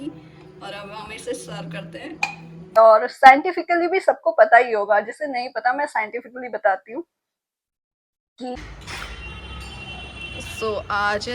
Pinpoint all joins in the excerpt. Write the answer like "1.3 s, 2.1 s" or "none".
2.8 s, 8.6 s